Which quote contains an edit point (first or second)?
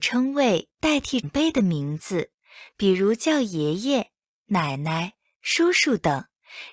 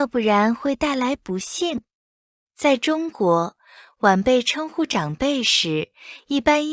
first